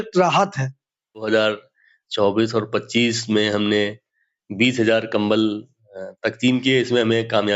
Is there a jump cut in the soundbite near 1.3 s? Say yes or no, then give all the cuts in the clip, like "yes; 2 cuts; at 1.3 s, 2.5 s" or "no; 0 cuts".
yes; 1 cut; at 1.3 s